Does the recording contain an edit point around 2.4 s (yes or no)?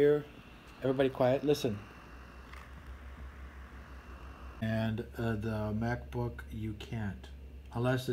no